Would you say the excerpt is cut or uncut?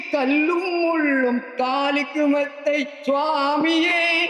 uncut